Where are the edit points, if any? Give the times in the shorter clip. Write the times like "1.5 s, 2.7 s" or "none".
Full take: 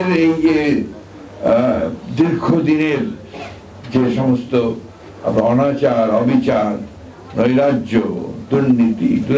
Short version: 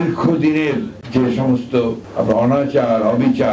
1.0 s, 2.0 s